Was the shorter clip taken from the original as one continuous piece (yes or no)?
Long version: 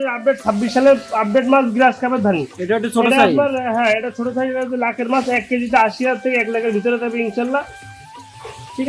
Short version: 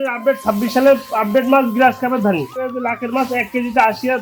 no